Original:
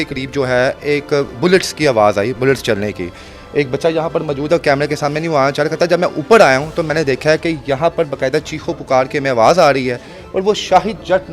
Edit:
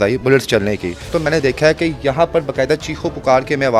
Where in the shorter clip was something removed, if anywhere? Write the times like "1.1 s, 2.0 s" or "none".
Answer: 1.0 s